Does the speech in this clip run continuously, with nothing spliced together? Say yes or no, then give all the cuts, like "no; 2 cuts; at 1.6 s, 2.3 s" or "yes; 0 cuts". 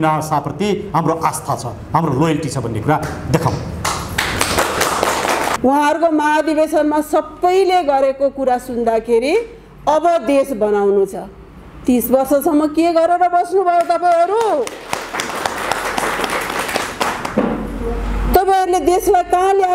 no; 1 cut; at 5.5 s